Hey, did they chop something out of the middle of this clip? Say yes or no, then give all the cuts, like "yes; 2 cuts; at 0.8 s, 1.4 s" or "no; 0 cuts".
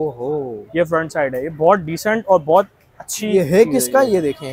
no; 0 cuts